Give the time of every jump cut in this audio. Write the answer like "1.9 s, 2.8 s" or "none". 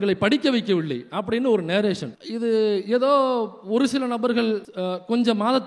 none